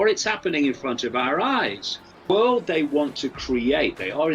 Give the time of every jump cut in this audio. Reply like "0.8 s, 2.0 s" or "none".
2.3 s